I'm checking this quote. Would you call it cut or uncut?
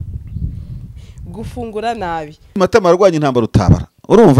cut